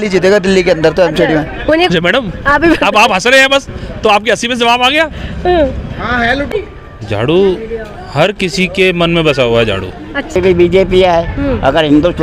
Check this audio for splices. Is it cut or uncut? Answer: cut